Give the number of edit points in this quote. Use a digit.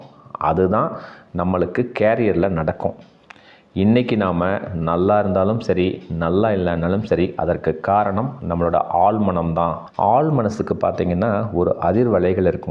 1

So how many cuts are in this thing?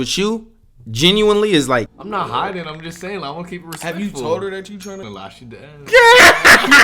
2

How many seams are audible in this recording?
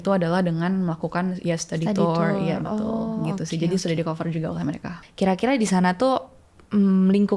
1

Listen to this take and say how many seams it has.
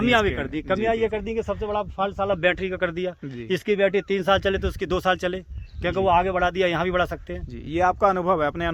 0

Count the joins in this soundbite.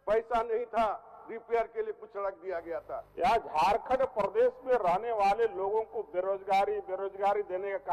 1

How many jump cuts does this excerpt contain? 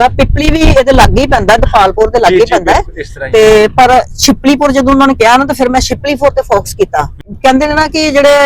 1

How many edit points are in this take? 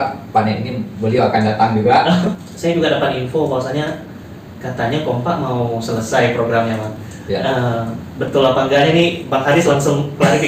1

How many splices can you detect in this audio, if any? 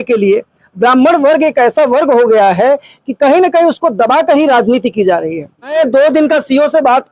1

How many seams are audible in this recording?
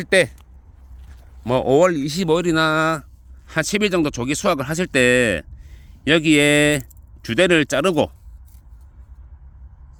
0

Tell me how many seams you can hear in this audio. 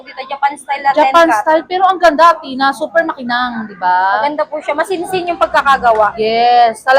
0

